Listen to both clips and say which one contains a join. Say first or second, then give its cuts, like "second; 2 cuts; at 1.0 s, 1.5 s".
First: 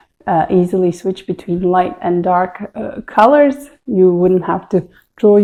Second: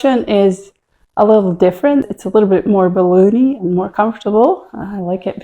second; 1 cut; at 2.1 s